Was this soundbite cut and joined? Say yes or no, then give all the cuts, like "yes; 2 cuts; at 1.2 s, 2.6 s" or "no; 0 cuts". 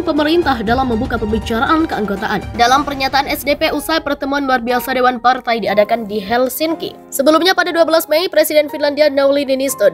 yes; 1 cut; at 2.5 s